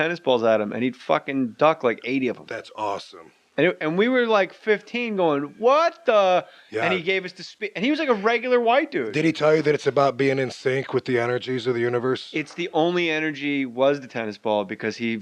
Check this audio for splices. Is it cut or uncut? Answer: cut